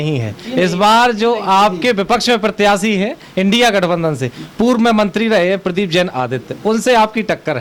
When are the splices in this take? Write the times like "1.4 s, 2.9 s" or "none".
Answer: none